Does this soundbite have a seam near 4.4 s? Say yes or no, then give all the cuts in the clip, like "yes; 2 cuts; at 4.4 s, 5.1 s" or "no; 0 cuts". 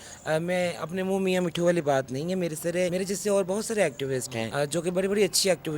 yes; 2 cuts; at 2.9 s, 4.4 s